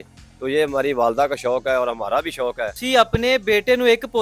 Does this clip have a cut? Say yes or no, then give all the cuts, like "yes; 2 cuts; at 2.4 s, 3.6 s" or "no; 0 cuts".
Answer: yes; 1 cut; at 2.8 s